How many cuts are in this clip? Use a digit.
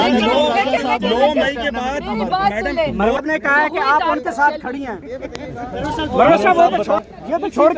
2